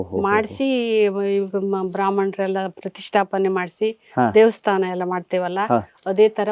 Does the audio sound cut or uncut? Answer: uncut